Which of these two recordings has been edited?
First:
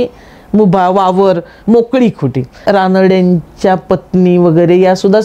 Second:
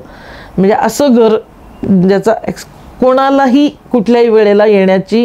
first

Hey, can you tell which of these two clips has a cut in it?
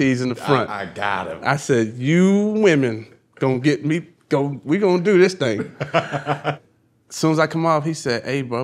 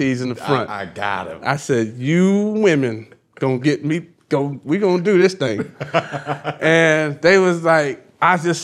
first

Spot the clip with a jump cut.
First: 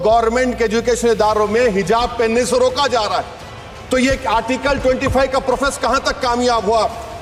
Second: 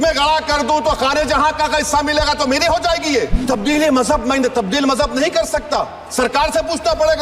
second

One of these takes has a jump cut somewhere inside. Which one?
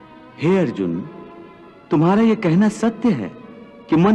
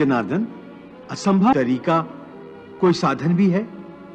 second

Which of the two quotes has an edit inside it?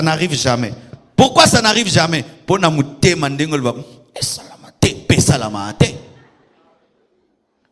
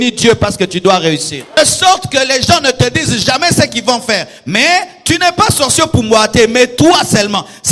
second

